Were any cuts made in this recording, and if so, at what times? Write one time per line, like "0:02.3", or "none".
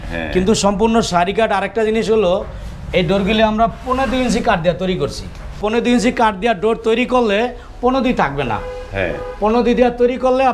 0:05.6